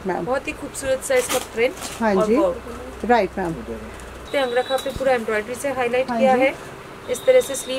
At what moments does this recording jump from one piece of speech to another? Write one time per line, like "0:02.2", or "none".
0:04.3